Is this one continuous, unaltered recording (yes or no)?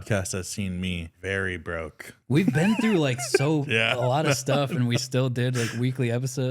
no